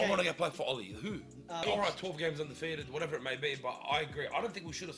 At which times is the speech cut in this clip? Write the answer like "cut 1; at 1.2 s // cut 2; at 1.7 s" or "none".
cut 1; at 1.6 s